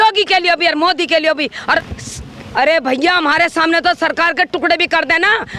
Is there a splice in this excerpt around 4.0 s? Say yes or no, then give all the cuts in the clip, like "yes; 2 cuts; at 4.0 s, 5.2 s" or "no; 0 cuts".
no; 1 cut; at 1.8 s